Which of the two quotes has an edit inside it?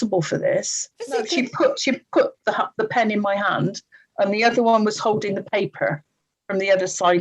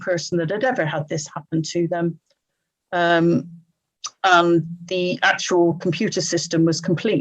first; 1 cut; at 1.2 s

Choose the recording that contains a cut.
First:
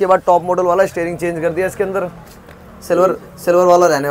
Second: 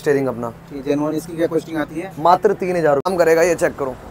second; 1 cut; at 3.1 s

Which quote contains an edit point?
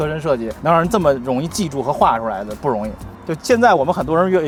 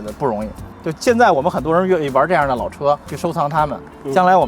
second; 1 cut; at 3.1 s

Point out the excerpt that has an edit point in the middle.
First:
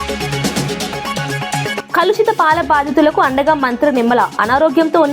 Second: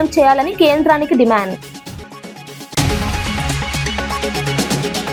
first; 1 cut; at 1.8 s

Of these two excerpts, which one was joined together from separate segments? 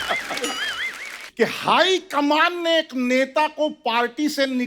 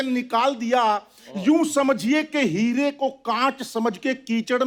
first; 1 cut; at 1.2 s

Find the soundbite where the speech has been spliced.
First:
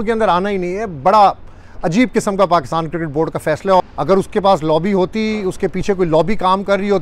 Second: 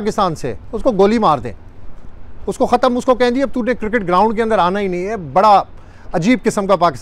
first; 1 cut; at 3.8 s

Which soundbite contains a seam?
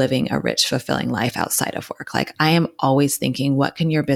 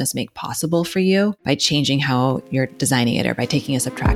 second; 2 cuts; at 1.4 s, 2.8 s

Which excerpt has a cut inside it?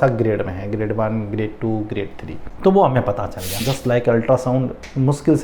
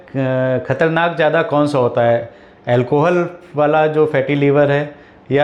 first; 1 cut; at 3.7 s

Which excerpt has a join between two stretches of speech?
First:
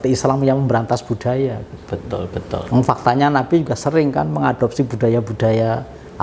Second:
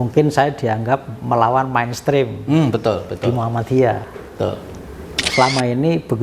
second; 1 cut; at 5.3 s

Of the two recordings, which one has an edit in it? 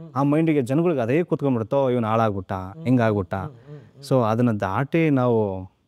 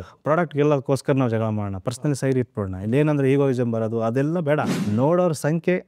second; 1 cut; at 4.8 s

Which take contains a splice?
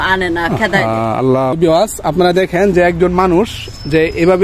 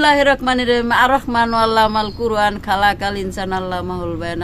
first; 1 cut; at 1.5 s

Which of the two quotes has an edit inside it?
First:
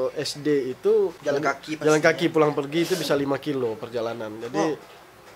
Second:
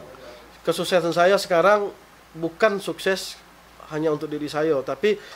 first; 1 cut; at 1.2 s

